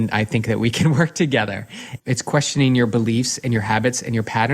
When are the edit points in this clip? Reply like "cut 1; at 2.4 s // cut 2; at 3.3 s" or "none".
cut 1; at 2.0 s